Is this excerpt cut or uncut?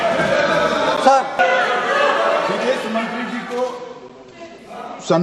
cut